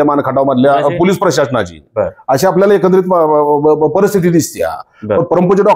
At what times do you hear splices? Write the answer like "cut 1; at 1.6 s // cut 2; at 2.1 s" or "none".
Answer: none

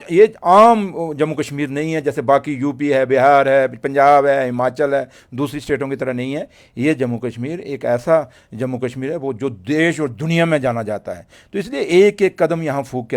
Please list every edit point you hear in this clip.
none

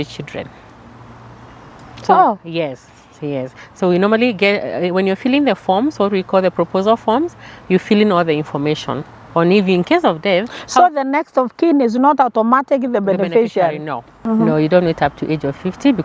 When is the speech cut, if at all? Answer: cut 1; at 14.1 s

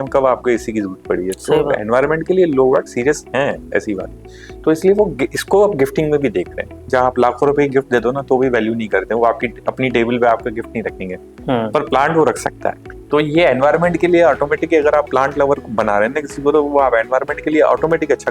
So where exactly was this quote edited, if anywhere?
cut 1; at 6.8 s // cut 2; at 12.9 s

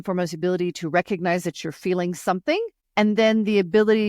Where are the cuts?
cut 1; at 2.8 s

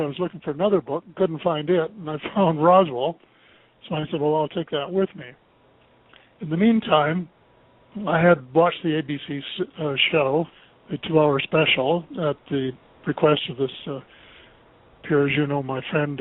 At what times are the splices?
cut 1; at 8.7 s

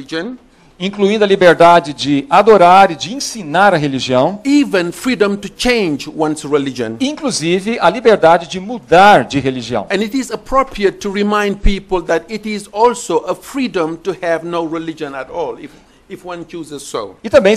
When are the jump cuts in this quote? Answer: cut 1; at 3.9 s

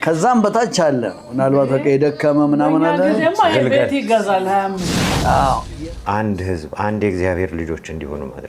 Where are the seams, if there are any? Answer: cut 1; at 5.7 s

